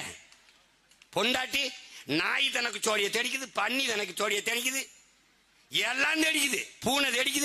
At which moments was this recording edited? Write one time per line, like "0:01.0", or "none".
none